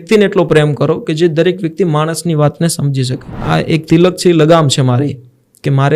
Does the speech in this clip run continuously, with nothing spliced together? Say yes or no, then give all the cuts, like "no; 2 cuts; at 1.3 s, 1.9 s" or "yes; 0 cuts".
no; 1 cut; at 3.4 s